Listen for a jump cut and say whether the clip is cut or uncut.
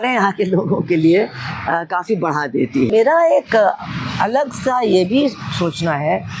cut